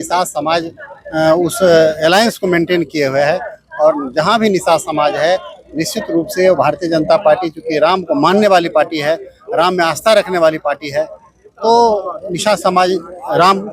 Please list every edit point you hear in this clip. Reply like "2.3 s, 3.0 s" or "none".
none